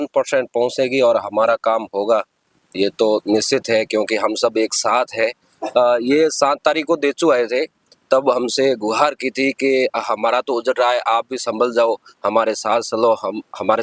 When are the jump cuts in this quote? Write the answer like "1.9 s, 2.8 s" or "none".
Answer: none